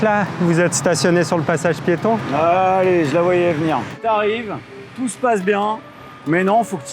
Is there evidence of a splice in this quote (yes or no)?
yes